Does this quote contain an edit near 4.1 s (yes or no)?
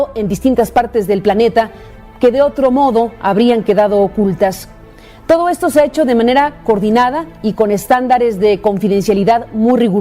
no